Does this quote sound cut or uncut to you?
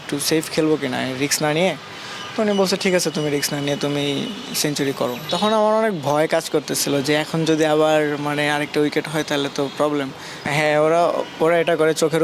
cut